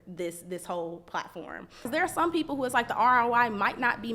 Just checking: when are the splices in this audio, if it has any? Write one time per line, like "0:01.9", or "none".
0:01.8